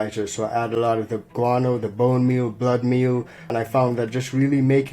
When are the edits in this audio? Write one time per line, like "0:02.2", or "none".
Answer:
0:03.4